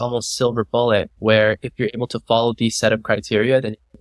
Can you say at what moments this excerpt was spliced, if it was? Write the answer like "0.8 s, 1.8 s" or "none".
1.1 s